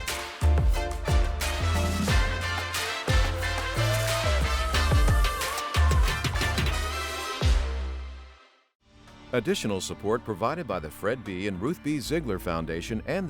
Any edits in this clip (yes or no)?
yes